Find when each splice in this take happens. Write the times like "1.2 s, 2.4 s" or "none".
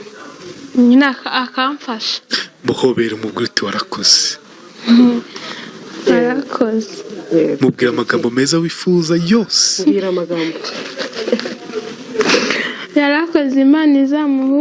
none